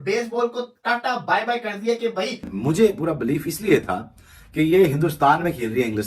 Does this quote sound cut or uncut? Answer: cut